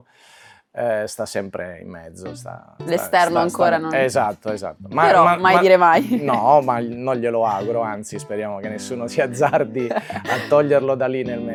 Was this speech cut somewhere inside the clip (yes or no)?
no